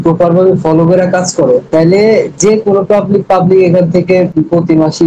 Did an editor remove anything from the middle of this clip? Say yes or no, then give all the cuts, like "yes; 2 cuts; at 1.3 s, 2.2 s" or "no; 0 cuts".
no; 0 cuts